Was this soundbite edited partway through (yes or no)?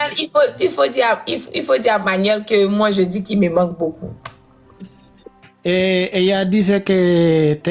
no